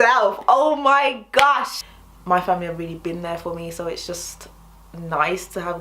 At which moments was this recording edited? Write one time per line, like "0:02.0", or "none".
0:01.8